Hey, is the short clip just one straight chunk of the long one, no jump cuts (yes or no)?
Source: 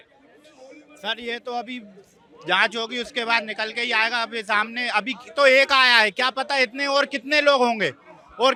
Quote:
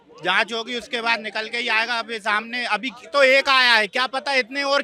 yes